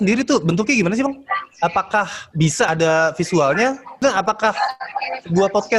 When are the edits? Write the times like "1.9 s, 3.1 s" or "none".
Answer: 2.7 s, 4.0 s